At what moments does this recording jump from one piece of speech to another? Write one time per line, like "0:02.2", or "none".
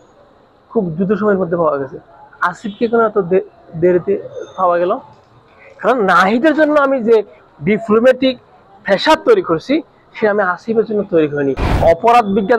0:11.7